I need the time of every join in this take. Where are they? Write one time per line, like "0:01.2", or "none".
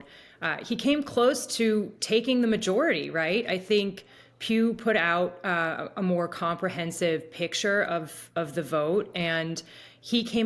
none